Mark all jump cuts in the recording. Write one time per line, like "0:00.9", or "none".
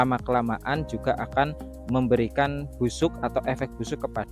none